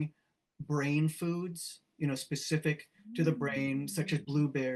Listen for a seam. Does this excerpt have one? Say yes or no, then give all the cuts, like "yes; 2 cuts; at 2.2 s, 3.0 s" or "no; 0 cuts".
no; 0 cuts